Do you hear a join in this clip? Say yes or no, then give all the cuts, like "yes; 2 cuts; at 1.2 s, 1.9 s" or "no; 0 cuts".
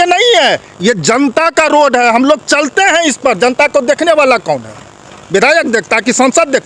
no; 0 cuts